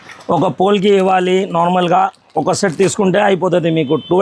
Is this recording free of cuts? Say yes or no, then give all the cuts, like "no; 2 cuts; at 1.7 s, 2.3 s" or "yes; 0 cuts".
yes; 0 cuts